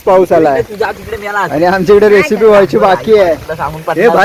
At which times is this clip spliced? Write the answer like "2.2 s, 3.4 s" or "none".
none

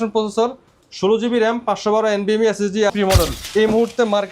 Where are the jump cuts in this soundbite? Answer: 2.9 s

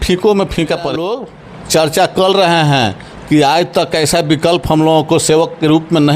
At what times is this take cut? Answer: 0.9 s

